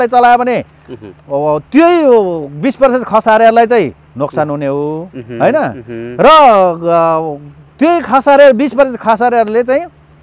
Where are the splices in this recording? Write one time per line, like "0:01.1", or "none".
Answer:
none